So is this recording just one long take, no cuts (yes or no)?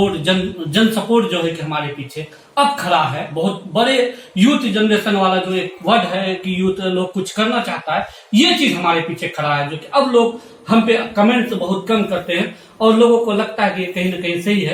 yes